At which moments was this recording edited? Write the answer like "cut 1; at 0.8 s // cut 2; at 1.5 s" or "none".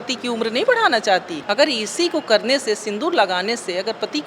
cut 1; at 1.4 s